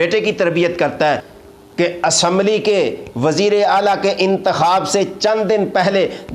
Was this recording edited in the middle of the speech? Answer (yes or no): yes